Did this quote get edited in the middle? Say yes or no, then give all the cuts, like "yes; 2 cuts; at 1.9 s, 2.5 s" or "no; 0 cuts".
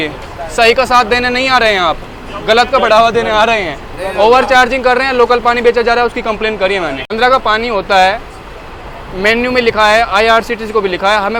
no; 0 cuts